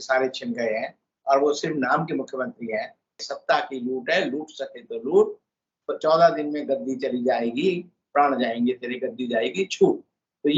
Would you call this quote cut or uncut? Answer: cut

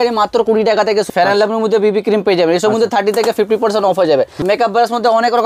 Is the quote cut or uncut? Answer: cut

